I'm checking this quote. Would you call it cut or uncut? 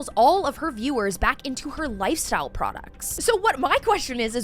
cut